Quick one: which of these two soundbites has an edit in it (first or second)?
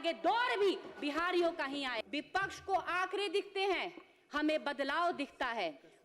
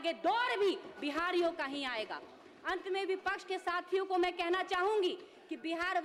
first